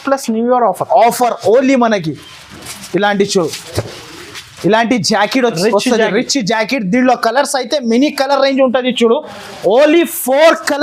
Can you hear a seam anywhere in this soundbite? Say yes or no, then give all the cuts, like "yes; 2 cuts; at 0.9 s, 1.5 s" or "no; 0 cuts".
no; 0 cuts